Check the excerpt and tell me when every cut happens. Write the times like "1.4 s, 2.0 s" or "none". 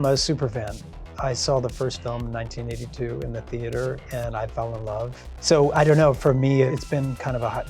5.3 s, 6.7 s